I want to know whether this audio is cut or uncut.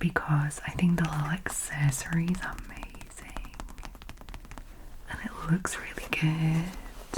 uncut